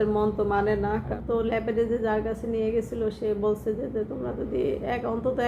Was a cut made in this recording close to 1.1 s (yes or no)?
yes